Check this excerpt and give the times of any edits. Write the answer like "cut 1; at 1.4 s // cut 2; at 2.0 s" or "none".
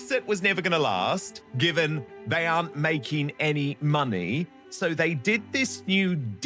cut 1; at 1.4 s // cut 2; at 2.1 s